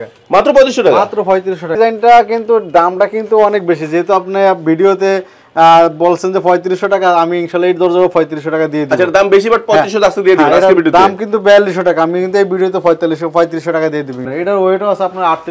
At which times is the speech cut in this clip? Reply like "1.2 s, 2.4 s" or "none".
1.7 s, 14.2 s